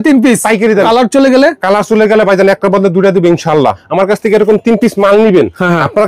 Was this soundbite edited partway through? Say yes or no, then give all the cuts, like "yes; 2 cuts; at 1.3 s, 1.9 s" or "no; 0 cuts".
yes; 2 cuts; at 0.8 s, 3.8 s